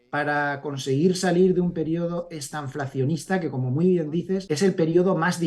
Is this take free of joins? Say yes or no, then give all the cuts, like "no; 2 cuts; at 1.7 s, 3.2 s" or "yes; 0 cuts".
no; 1 cut; at 4.5 s